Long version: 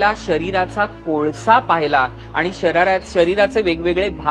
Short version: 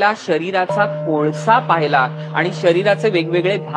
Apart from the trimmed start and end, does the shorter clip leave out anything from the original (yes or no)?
yes